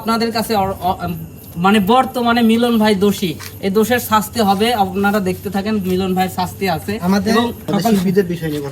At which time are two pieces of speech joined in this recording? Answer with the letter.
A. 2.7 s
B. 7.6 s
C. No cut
B